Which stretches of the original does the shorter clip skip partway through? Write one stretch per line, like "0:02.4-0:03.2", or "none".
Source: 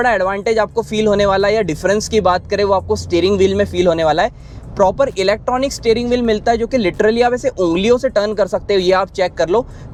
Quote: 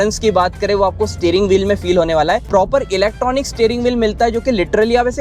0:04.3-0:04.7